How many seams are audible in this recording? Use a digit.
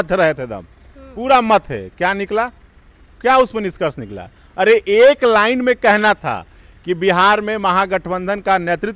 0